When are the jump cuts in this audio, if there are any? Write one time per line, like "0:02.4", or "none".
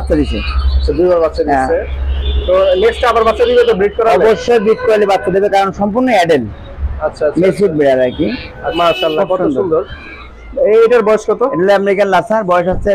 0:08.7

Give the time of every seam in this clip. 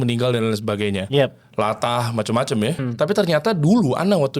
0:02.9

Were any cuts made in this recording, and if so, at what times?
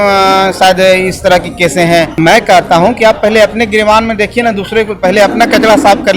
0:02.1

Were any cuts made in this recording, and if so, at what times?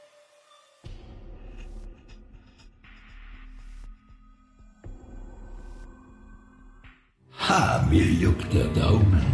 0:07.1

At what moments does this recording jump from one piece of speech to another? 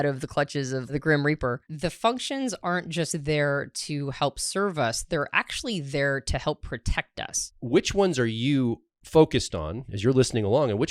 0:00.9
0:01.7
0:07.5

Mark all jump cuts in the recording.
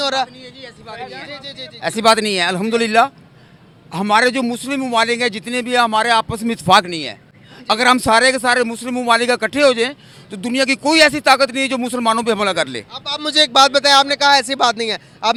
none

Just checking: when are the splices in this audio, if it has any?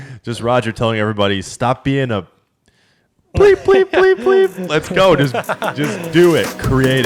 none

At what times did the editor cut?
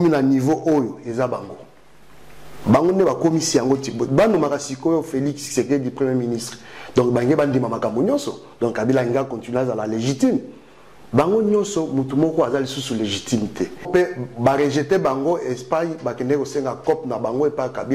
0:13.9

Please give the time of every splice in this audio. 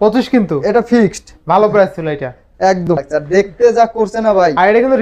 0:02.9

